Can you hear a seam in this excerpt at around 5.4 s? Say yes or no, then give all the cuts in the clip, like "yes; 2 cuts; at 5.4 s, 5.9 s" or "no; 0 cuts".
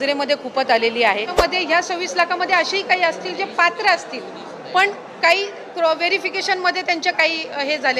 no; 1 cut; at 1.3 s